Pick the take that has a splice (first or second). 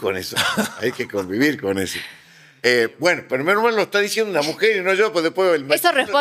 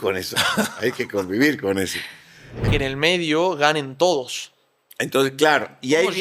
second